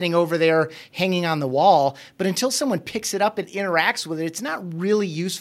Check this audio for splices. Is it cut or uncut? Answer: uncut